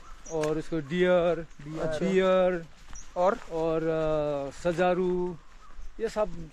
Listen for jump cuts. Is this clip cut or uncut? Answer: uncut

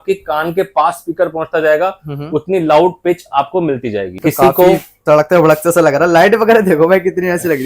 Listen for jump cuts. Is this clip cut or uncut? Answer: cut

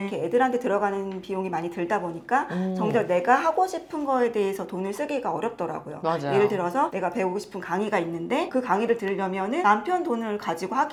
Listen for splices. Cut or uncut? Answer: uncut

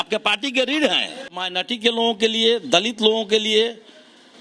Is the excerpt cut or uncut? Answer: cut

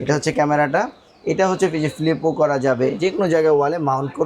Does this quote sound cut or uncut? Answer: cut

